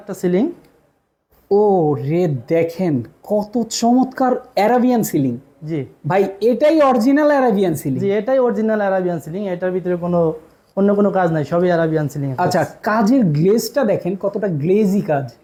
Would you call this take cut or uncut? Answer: uncut